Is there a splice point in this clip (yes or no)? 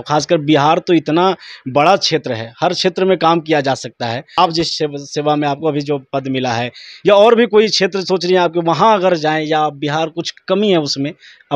no